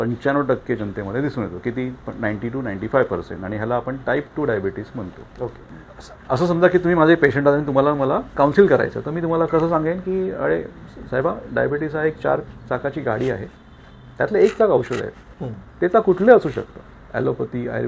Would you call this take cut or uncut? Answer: cut